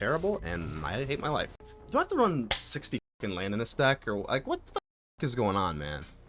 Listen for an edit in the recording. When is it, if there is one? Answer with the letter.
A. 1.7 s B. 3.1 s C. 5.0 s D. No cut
A